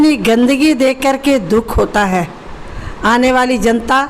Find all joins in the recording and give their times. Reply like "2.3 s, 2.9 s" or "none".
none